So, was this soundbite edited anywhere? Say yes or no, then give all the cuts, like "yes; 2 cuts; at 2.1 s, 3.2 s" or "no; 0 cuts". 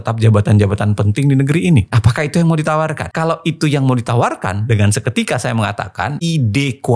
no; 0 cuts